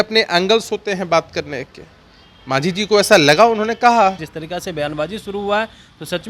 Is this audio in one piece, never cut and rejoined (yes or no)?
no